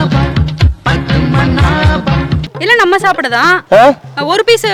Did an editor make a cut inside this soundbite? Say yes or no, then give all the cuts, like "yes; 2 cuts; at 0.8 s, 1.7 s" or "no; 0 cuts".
no; 0 cuts